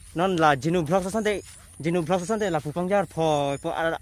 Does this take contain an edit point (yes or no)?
no